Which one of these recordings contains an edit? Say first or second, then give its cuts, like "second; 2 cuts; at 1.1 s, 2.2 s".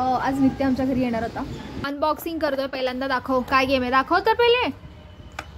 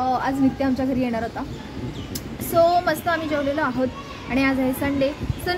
first; 1 cut; at 1.9 s